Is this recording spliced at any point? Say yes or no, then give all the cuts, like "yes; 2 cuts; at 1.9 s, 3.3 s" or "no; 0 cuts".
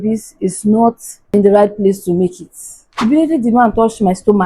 yes; 2 cuts; at 1.1 s, 3.0 s